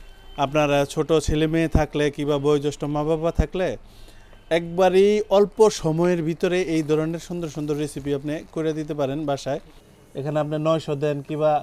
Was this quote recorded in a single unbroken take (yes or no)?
no